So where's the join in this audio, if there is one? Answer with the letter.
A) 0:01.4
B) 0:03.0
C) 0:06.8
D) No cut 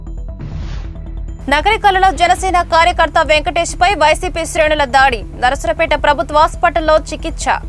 A